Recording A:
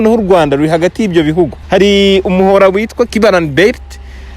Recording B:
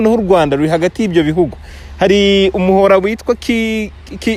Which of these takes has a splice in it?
A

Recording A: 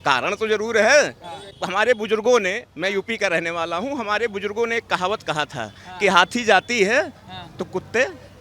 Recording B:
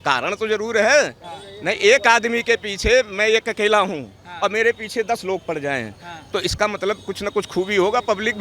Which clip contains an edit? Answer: A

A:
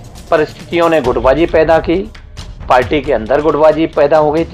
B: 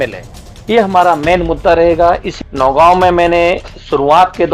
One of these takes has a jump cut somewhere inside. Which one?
B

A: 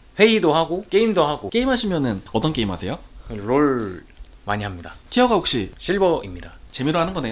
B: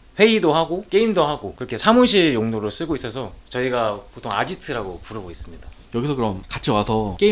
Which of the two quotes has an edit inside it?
A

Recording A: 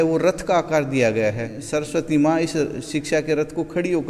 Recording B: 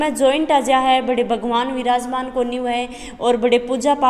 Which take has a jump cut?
A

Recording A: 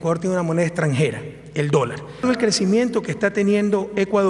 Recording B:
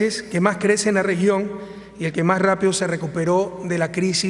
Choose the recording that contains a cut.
A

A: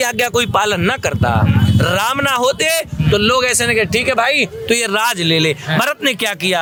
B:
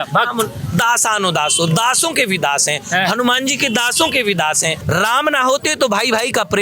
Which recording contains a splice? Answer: B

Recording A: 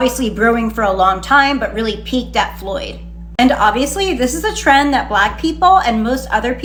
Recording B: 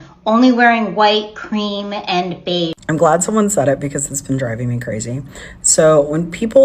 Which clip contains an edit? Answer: B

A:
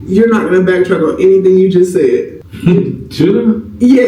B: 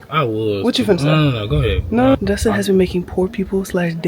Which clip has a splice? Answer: B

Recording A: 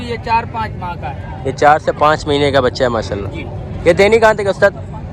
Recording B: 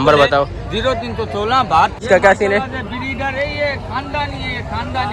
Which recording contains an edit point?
B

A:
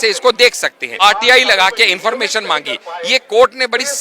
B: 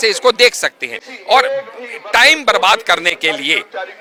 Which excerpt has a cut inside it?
A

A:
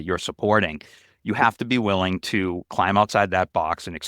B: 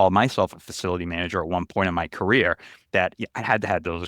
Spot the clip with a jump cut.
A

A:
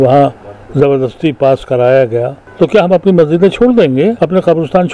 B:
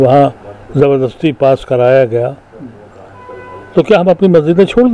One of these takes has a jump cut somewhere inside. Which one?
A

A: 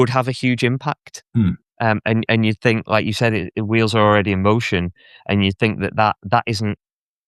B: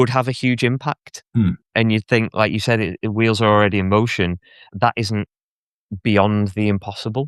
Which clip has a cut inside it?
B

